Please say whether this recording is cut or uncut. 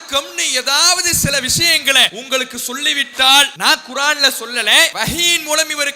cut